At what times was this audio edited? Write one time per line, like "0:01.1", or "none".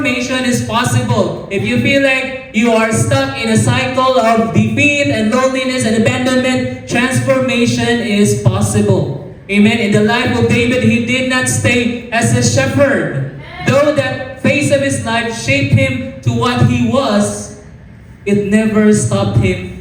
none